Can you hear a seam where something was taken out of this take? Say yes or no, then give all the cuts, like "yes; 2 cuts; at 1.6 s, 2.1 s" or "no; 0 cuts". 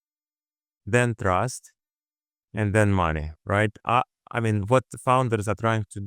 no; 0 cuts